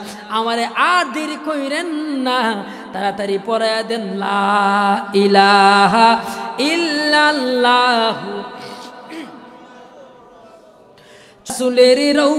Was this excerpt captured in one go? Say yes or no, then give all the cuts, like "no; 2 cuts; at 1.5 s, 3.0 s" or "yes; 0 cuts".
no; 1 cut; at 11.5 s